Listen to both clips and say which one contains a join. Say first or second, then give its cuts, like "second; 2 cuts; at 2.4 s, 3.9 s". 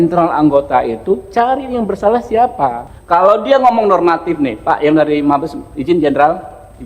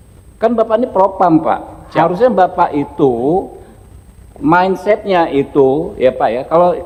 first; 1 cut; at 2.9 s